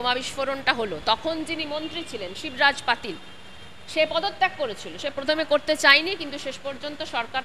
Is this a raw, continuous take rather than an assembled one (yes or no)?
yes